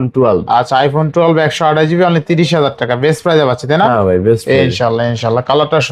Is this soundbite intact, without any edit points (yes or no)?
yes